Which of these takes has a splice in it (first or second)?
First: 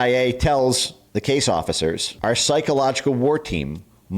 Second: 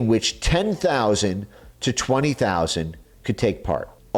first